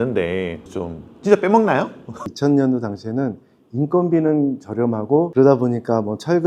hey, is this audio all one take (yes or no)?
no